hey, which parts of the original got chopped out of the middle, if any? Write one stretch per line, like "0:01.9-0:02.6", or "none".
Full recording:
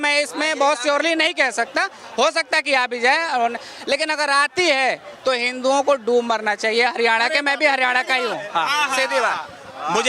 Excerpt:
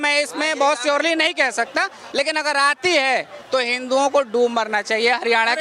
0:02.0-0:03.7